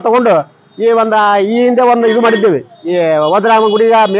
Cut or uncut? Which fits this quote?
uncut